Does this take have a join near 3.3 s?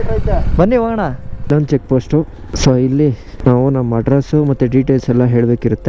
yes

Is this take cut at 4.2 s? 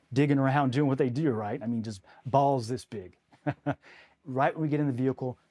yes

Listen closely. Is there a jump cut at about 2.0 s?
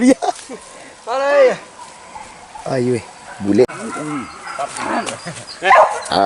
no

